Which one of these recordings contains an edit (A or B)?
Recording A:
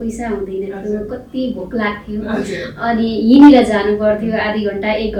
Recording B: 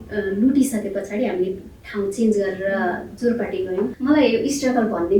B